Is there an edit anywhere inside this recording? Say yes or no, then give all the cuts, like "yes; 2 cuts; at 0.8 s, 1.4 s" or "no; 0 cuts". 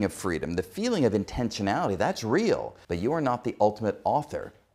yes; 1 cut; at 2.8 s